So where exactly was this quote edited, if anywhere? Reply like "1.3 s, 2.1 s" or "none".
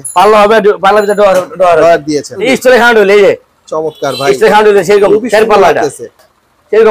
2.4 s